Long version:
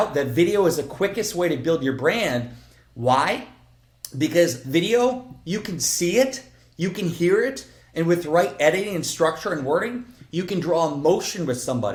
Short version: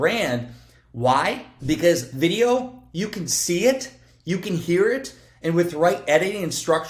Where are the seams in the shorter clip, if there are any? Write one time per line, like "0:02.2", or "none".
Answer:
0:01.5